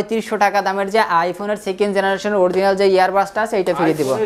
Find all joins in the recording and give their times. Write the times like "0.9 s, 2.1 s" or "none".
none